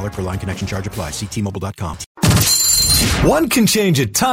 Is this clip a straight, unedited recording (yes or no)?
no